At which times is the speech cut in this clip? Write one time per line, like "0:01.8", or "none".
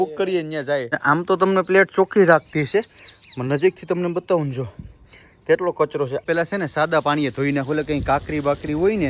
0:00.9
0:06.2